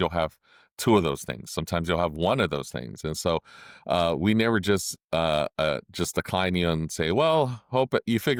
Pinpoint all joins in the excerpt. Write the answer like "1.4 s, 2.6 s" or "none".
none